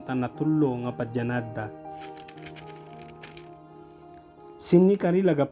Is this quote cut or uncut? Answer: uncut